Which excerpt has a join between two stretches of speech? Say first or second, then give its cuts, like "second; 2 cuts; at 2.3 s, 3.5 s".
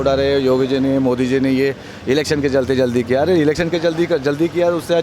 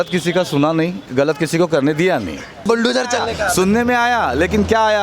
second; 2 cuts; at 1.0 s, 2.6 s